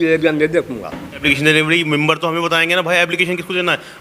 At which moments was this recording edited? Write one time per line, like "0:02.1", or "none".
0:01.2

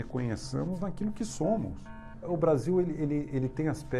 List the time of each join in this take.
0:02.2

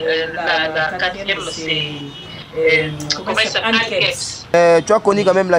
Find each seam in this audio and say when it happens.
0:04.5

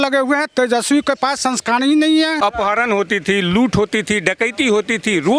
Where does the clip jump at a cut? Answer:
0:02.4

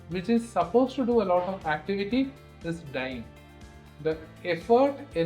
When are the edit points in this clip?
none

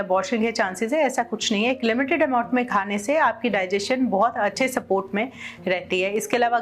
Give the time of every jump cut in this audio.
none

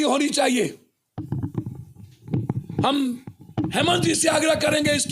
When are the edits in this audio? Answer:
none

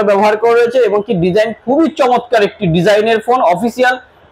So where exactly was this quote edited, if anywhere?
none

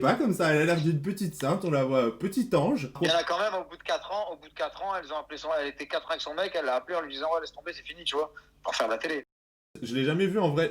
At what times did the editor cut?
0:03.0
0:09.7

